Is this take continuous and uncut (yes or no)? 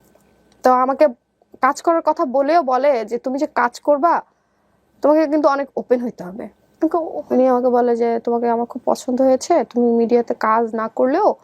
no